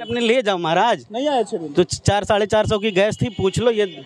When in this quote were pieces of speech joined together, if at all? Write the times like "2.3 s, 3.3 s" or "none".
none